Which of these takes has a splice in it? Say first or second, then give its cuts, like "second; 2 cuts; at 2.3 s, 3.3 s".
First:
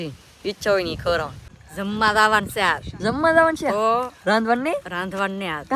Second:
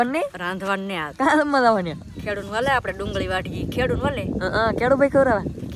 first; 1 cut; at 1.6 s